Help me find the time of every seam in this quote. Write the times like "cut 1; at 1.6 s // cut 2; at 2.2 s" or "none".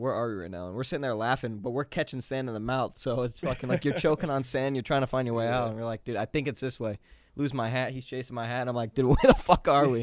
none